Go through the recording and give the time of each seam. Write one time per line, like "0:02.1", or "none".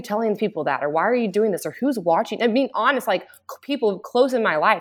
none